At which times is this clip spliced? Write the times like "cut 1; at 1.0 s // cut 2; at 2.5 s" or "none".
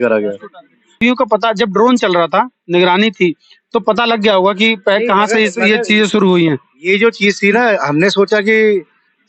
cut 1; at 1.0 s